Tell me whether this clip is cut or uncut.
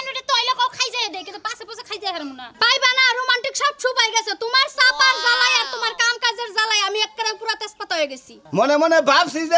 cut